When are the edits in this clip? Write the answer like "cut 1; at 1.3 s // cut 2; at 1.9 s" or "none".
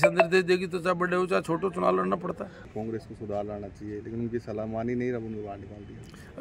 cut 1; at 2.6 s